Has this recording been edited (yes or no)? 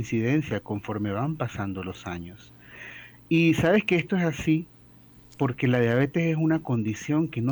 no